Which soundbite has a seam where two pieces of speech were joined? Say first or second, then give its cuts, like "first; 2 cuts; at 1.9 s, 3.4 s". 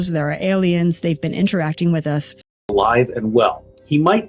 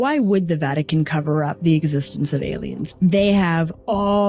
first; 1 cut; at 2.6 s